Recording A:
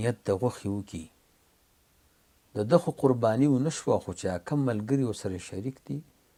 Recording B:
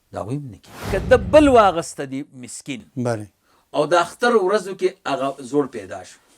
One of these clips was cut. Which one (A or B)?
B